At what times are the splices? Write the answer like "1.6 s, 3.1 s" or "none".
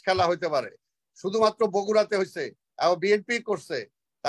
none

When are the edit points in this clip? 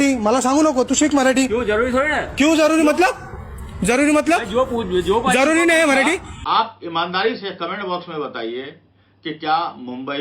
6.3 s

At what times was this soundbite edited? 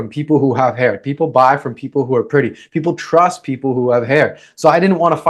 none

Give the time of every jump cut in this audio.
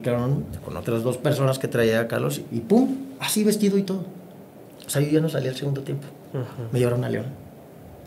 none

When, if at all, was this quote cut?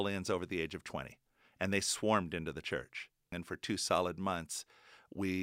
3.4 s

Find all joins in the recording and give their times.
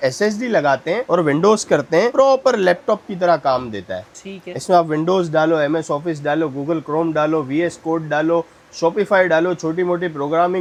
none

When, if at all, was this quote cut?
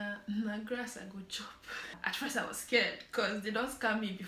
2.0 s

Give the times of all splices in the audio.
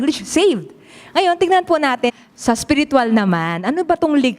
2.1 s

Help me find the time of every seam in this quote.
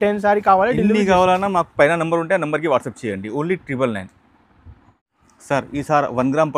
none

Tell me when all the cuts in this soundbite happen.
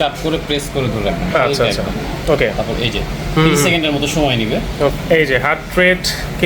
4.9 s

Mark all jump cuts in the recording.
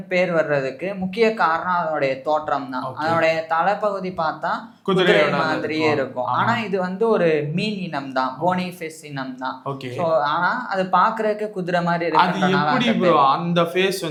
none

